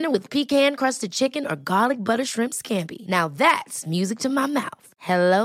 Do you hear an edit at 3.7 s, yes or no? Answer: no